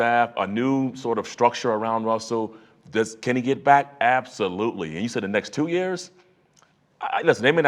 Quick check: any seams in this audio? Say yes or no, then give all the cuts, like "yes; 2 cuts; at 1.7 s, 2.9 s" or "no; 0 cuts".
no; 0 cuts